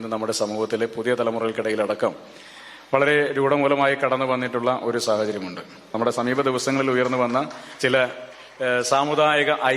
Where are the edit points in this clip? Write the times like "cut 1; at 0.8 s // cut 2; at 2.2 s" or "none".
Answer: cut 1; at 5.9 s

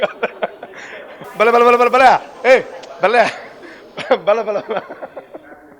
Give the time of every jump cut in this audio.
cut 1; at 1.1 s

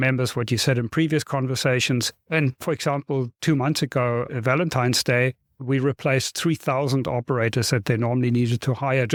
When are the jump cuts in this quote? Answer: none

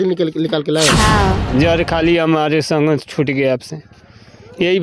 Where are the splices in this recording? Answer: cut 1; at 1.5 s

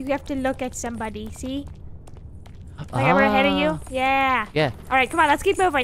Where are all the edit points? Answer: cut 1; at 4.8 s

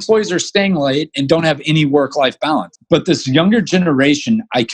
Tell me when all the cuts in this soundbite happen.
cut 1; at 2.7 s

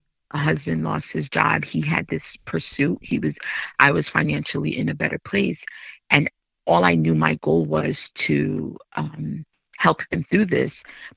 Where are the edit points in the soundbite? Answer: none

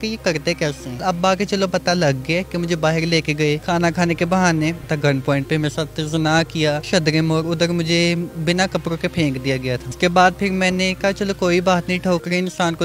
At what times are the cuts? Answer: cut 1; at 1.0 s // cut 2; at 2.5 s // cut 3; at 3.6 s // cut 4; at 4.9 s // cut 5; at 6.8 s // cut 6; at 9.9 s

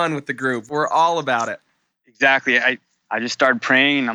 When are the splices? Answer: cut 1; at 2.9 s

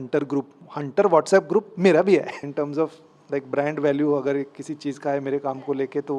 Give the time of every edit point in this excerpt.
cut 1; at 2.3 s

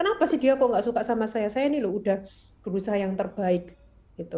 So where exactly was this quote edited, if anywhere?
none

